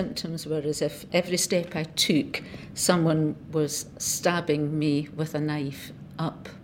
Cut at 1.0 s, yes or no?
yes